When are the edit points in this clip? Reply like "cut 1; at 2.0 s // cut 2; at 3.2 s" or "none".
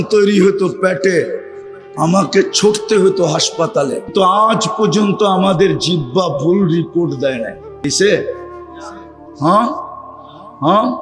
cut 1; at 4.1 s // cut 2; at 7.9 s